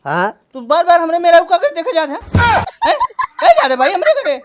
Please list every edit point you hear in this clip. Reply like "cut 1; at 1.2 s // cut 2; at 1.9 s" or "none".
none